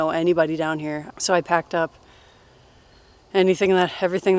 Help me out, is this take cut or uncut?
cut